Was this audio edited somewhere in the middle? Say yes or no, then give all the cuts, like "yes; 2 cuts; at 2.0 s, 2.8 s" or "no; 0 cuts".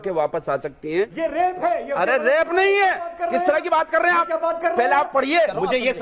yes; 2 cuts; at 1.1 s, 5.3 s